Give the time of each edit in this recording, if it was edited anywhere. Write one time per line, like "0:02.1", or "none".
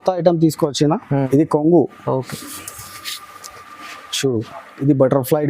0:01.3